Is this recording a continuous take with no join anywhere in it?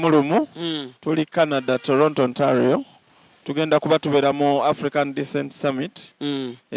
yes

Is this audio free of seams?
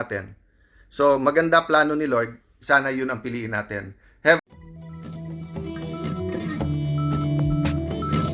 no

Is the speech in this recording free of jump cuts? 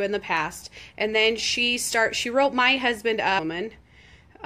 yes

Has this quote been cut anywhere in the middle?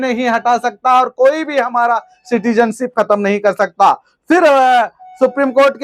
no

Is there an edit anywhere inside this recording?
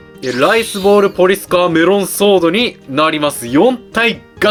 no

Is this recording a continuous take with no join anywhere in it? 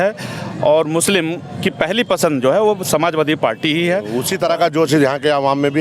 no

